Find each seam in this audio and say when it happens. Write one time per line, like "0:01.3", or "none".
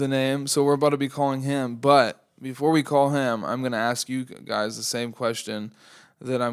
none